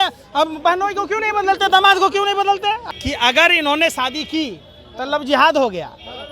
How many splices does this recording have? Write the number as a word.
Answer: one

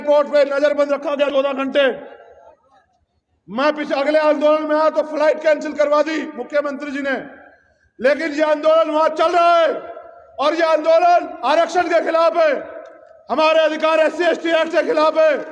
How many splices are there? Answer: one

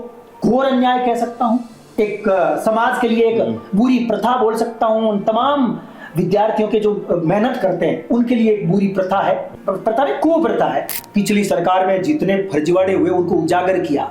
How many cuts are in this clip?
two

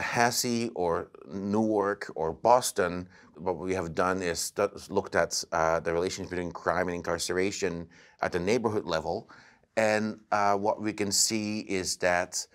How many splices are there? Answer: one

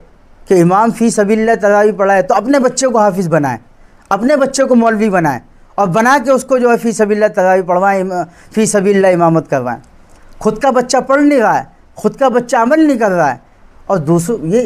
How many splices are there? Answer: zero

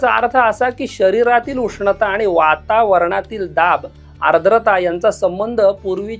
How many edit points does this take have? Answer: zero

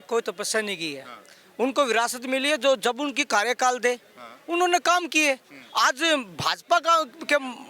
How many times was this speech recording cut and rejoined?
zero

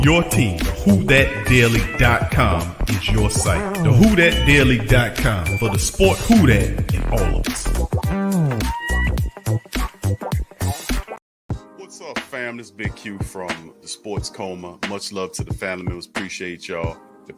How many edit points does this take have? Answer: one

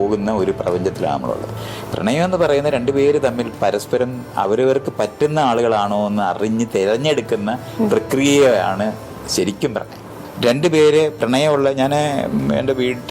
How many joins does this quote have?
two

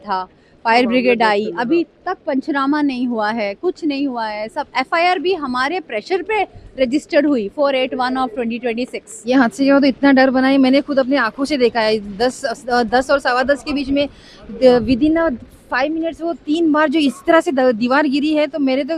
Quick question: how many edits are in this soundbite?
one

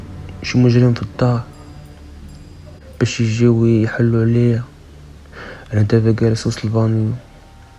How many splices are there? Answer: zero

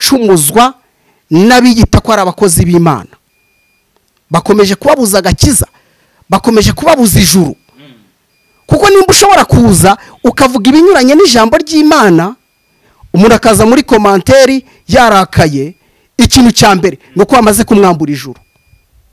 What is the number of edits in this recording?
zero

